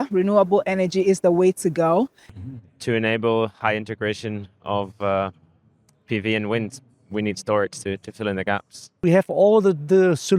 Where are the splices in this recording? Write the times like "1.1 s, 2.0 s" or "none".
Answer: 2.3 s, 8.9 s

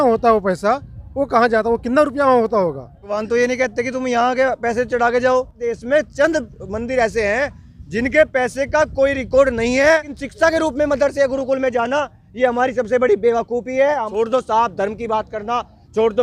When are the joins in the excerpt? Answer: 3.2 s, 5.6 s, 10.2 s, 14.1 s

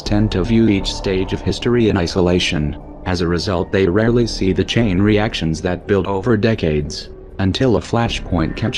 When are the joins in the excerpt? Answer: 4.8 s

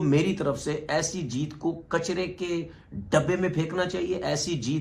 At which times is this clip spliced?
none

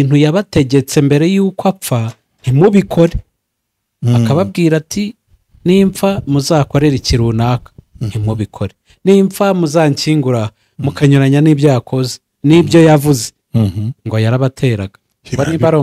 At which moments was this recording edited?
none

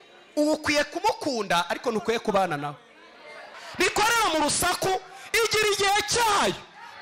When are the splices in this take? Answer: 3.6 s

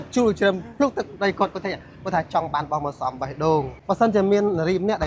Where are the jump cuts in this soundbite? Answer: 3.7 s

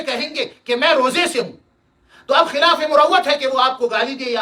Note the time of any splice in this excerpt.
none

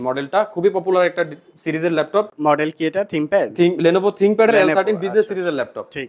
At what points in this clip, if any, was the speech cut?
none

